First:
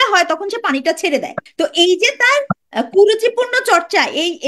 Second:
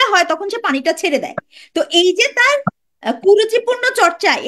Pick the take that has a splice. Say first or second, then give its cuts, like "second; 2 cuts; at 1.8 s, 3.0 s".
first; 2 cuts; at 1.4 s, 2.6 s